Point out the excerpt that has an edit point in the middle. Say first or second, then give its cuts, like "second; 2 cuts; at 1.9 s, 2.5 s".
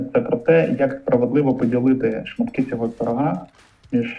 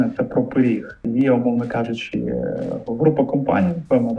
second; 1 cut; at 1.1 s